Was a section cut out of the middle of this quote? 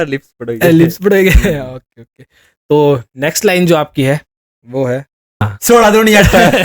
yes; 1 cut; at 5.5 s

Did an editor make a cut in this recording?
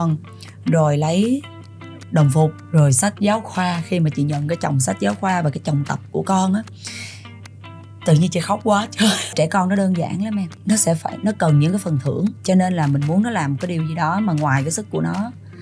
yes; 4 cuts; at 2.6 s, 9.3 s, 10.5 s, 12.4 s

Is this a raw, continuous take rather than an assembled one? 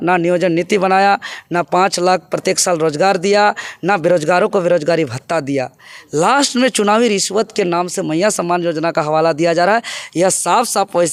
yes; 0 cuts

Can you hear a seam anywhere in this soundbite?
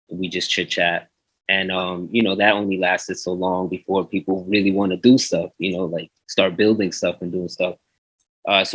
no; 0 cuts

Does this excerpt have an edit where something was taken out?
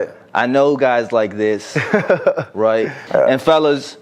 yes; 1 cut; at 3.0 s

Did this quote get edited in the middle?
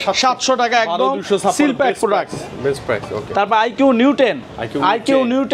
no; 0 cuts

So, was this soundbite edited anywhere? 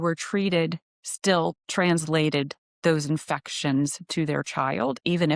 no; 0 cuts

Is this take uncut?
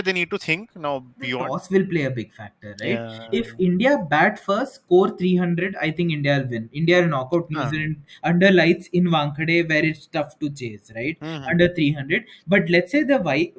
no; 1 cut; at 1.4 s

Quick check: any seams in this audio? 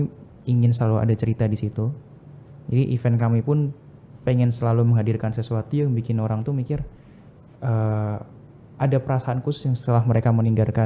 no; 0 cuts

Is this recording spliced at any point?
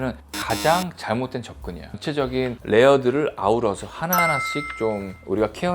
yes; 1 cut; at 1.9 s

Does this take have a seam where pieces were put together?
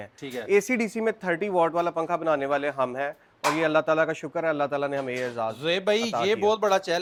no; 0 cuts

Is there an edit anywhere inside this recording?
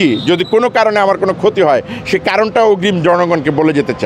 no; 0 cuts

